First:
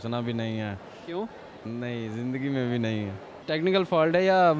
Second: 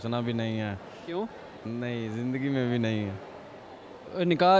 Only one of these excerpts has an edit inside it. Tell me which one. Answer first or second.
first